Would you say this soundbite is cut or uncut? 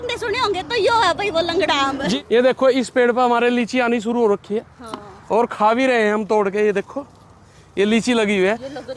cut